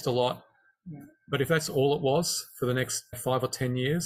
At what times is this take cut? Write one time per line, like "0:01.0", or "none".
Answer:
none